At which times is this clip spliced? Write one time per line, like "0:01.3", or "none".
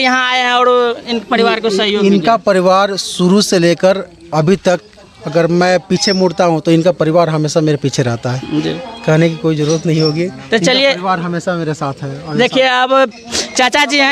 none

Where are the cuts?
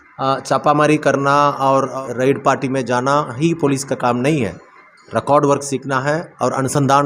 0:02.0

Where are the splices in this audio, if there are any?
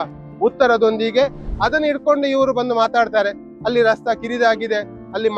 0:01.5

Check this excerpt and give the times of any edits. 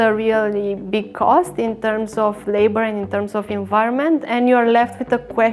none

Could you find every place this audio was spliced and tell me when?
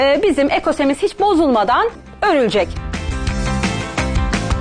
0:02.0
0:02.9

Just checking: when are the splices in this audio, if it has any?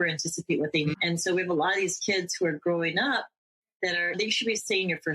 0:00.9
0:04.2

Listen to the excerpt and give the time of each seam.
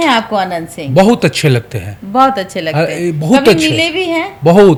none

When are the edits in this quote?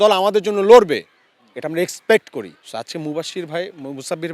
0:02.6

